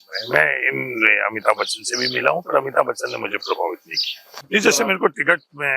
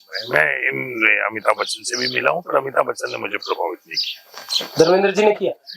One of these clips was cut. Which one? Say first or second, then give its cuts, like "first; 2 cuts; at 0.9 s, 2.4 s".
first; 1 cut; at 4.4 s